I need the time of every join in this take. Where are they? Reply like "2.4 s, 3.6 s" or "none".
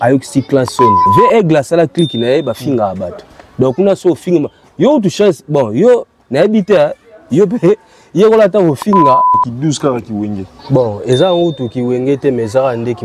1.0 s, 9.3 s